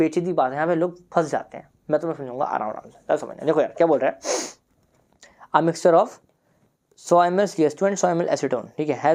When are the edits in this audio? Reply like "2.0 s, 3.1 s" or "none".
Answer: none